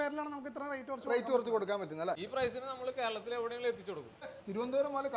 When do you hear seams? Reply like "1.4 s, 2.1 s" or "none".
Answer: 2.2 s, 4.3 s